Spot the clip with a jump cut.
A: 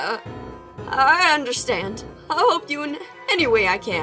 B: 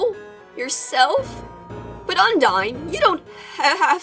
B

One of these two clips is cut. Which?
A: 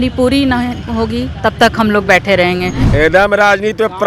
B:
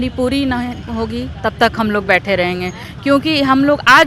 A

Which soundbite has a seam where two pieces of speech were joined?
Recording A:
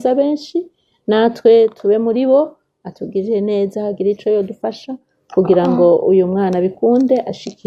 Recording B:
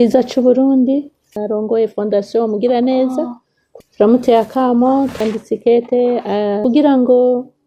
B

